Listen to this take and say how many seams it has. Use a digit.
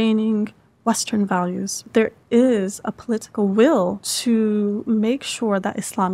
2